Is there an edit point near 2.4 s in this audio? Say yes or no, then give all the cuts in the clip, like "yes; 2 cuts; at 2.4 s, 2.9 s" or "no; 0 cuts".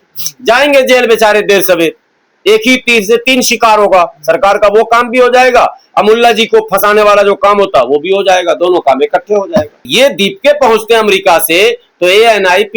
no; 1 cut; at 9.9 s